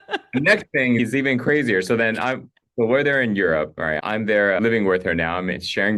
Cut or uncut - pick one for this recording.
cut